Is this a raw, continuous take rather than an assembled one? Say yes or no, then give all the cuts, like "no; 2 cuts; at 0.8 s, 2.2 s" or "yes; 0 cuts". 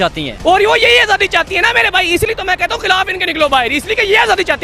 yes; 0 cuts